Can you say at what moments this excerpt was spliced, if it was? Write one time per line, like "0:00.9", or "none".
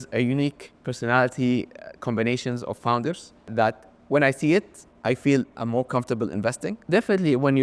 0:03.5
0:06.8